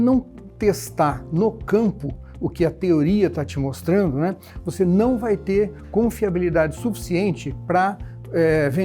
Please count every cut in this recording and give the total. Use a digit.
0